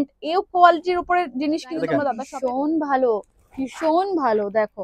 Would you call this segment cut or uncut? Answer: cut